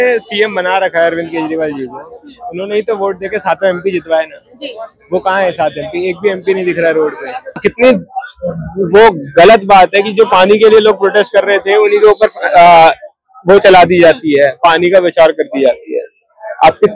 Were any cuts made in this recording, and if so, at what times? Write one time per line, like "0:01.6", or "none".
0:07.6